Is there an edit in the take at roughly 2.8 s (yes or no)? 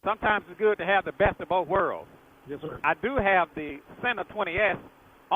yes